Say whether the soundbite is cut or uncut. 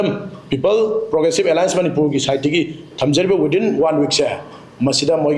uncut